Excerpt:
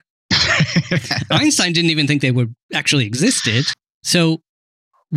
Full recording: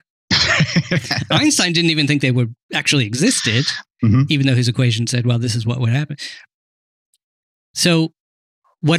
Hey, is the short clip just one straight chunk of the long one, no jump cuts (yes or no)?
no